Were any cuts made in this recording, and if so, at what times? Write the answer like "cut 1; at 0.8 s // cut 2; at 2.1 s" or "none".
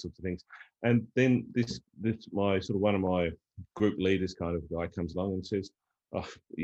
none